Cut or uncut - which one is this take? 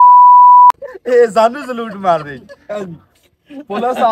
cut